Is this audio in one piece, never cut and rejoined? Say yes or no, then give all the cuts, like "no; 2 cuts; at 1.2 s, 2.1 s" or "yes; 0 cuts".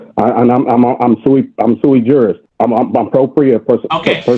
no; 1 cut; at 2.4 s